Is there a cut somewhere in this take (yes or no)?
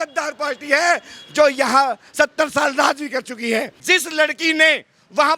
yes